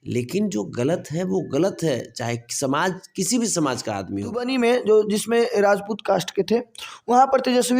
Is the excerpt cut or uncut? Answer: cut